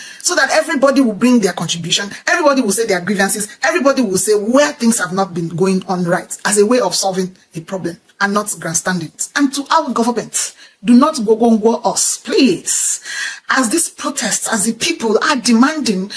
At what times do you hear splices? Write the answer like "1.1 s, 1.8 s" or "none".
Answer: 9.2 s